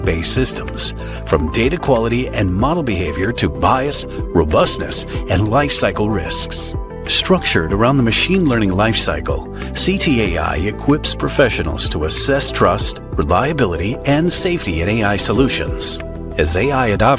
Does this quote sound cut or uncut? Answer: uncut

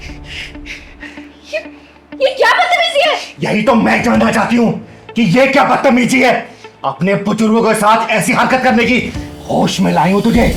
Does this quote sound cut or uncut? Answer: uncut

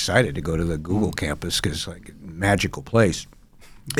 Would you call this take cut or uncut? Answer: uncut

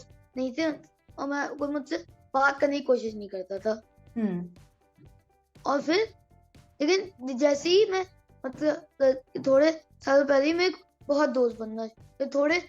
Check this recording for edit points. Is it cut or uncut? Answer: uncut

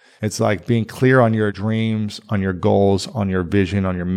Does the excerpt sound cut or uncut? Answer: cut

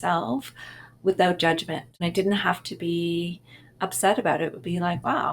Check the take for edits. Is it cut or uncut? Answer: cut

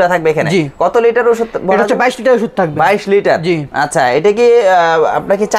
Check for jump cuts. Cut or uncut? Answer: uncut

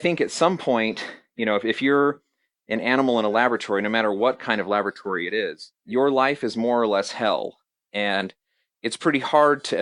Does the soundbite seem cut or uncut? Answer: cut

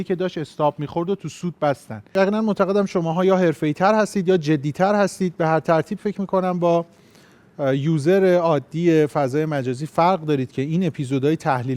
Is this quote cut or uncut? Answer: cut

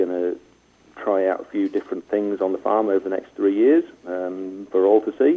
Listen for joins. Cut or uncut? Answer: uncut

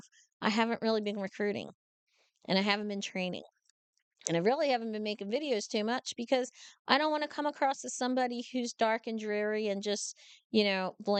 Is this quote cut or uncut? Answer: uncut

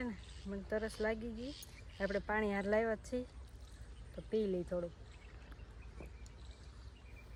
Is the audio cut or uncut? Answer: uncut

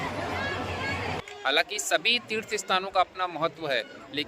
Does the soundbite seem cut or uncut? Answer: cut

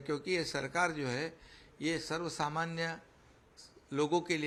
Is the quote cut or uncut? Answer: uncut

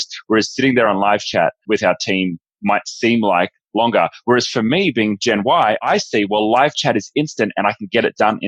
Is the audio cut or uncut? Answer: uncut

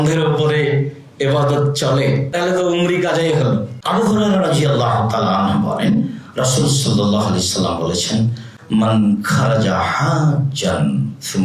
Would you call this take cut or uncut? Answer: cut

